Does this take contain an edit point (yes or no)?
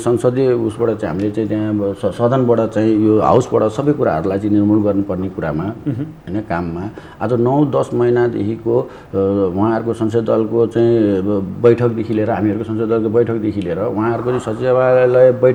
no